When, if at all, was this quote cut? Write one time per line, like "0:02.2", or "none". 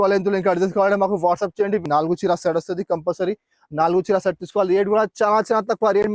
0:01.8